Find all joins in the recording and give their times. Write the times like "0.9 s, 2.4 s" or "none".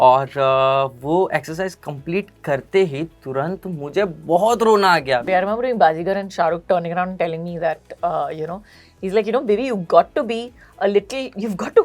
5.2 s